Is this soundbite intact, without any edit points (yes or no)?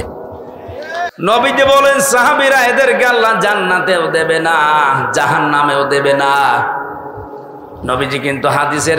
no